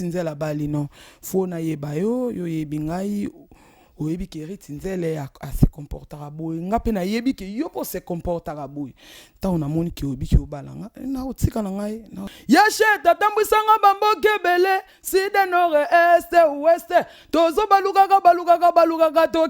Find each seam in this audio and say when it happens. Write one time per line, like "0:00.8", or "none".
0:12.3